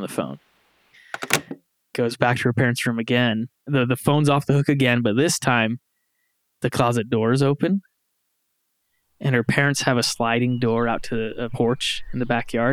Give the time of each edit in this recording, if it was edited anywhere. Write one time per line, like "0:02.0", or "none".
none